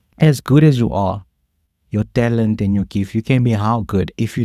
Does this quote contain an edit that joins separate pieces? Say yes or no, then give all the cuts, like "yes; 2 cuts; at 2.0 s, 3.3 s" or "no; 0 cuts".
no; 0 cuts